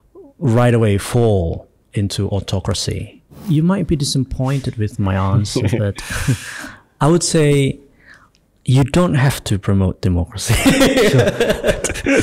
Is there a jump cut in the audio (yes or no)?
yes